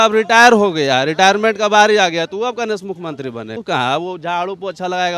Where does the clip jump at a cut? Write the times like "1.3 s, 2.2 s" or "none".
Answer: 3.6 s